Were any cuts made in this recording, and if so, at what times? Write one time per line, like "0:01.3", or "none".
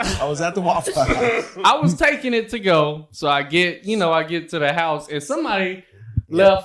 none